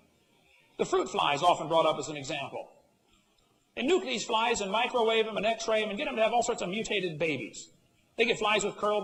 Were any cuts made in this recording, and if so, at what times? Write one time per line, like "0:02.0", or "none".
none